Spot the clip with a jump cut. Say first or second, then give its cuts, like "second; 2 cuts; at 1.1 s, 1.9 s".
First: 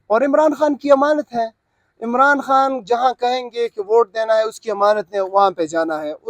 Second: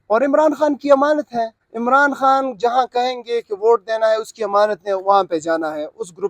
second; 1 cut; at 1.6 s